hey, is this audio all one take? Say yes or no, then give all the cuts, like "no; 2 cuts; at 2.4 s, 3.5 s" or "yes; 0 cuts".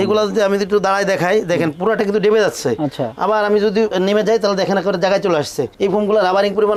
yes; 0 cuts